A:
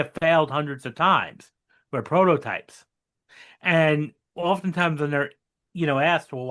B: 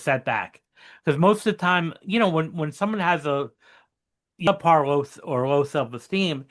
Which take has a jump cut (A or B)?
B